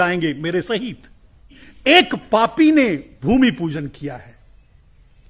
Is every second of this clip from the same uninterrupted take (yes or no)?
no